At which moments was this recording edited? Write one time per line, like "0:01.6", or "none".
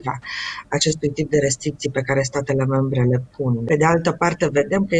0:03.6